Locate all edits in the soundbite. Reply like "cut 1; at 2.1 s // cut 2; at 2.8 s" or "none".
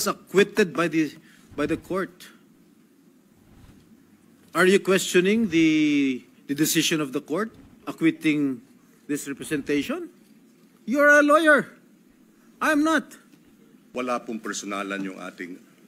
cut 1; at 13.9 s

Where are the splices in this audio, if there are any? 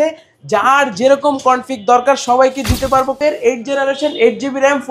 cut 1; at 3.2 s

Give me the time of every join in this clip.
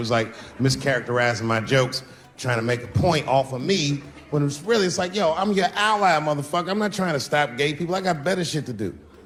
none

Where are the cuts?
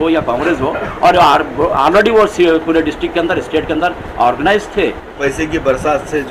cut 1; at 5.1 s

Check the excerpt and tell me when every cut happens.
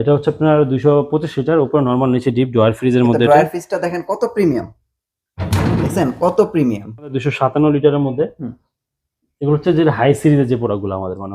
cut 1; at 7.2 s

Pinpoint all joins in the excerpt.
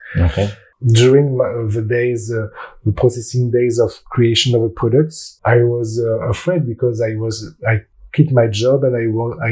cut 1; at 5.2 s // cut 2; at 7.9 s

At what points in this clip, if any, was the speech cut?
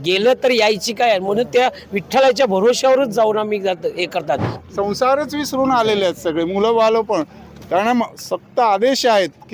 cut 1; at 4.5 s

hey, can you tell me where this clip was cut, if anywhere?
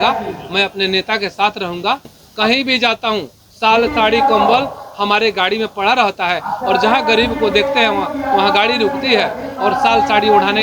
cut 1; at 2.2 s

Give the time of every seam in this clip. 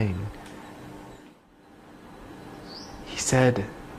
cut 1; at 1.3 s

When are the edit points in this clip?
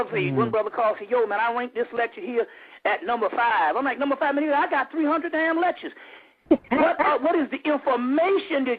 cut 1; at 1.2 s

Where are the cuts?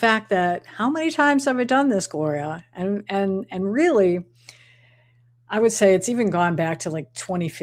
none

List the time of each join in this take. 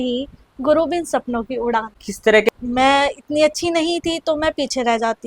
cut 1; at 2.5 s

